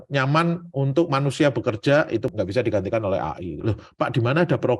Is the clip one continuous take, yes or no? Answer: no